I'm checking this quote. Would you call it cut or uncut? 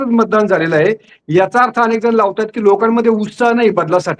uncut